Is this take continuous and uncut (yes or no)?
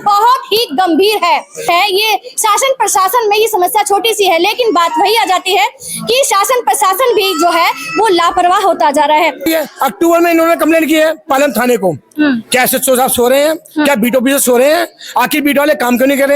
no